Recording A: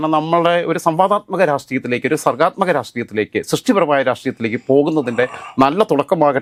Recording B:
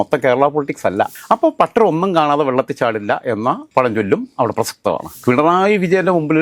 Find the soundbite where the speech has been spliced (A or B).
B